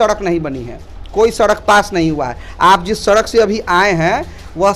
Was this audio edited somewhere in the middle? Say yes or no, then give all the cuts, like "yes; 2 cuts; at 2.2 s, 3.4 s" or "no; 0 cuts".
no; 0 cuts